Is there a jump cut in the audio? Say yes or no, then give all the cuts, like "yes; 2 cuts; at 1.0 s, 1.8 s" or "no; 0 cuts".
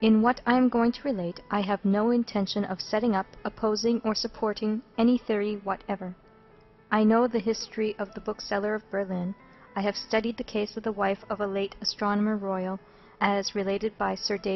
yes; 1 cut; at 11.6 s